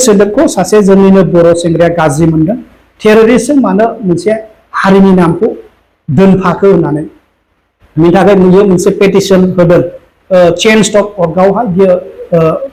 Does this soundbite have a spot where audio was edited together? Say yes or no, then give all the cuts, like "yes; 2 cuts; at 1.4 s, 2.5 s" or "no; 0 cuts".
no; 0 cuts